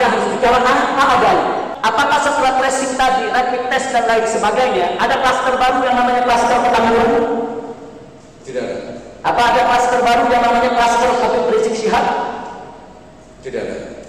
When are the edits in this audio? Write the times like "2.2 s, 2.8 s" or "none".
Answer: 1.7 s